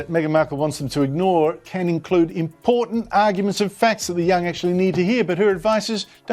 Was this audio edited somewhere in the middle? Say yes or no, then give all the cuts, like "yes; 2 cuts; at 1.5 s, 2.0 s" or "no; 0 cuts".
no; 0 cuts